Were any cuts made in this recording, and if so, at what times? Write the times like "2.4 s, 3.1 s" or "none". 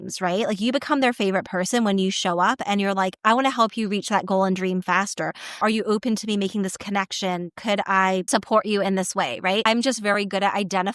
5.6 s, 8.3 s, 9.6 s